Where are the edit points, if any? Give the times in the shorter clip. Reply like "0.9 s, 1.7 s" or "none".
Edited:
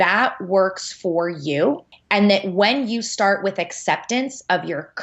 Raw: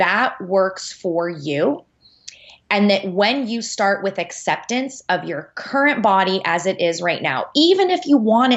1.9 s